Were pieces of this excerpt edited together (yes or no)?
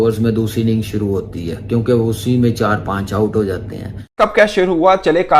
yes